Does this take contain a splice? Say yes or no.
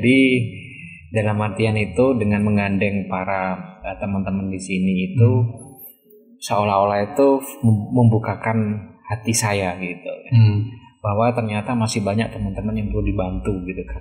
no